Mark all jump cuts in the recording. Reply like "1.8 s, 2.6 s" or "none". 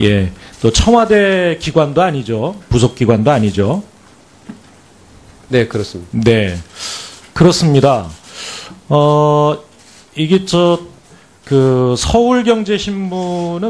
none